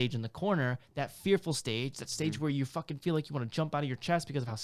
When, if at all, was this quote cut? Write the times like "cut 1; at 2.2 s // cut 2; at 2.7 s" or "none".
none